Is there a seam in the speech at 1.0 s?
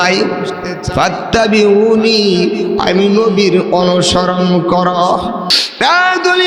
no; 1 cut; at 5.5 s

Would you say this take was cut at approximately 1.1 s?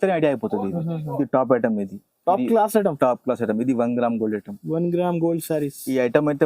yes; 1 cut; at 1.1 s

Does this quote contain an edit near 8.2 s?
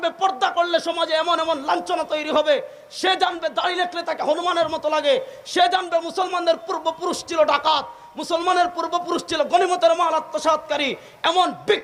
no; 0 cuts

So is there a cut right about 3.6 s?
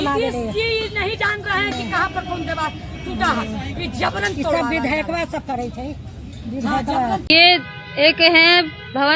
no; 1 cut; at 7.3 s

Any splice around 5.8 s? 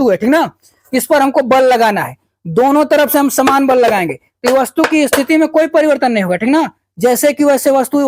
no; 0 cuts

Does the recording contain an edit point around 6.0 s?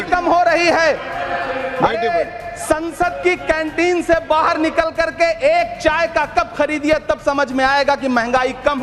no; 0 cuts

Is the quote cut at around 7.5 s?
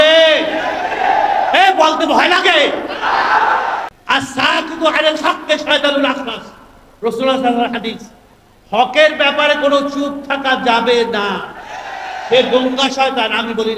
no; 1 cut; at 3.8 s

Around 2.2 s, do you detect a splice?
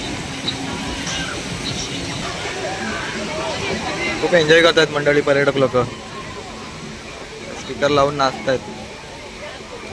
yes; 1 cut; at 2.2 s

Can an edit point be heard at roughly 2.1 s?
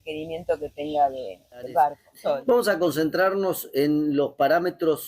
yes; 1 cut; at 2.1 s

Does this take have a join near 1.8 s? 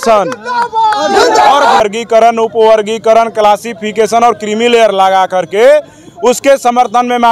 yes; 1 cut; at 1.8 s

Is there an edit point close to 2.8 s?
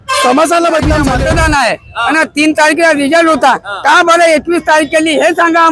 no; 1 cut; at 1.1 s

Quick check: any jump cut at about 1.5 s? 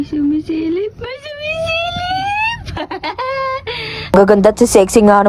no; 1 cut; at 4.1 s

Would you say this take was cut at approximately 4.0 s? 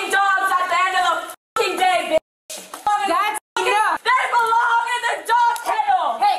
yes; 2 cuts; at 2.9 s, 4.0 s

